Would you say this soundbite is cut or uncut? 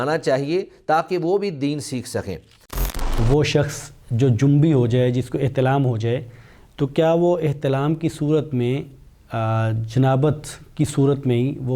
cut